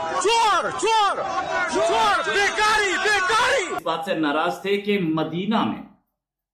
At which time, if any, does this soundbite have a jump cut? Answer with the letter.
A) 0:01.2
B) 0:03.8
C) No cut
B